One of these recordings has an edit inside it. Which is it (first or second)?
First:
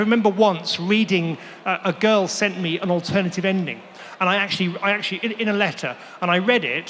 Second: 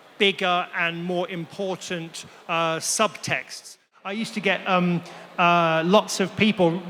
second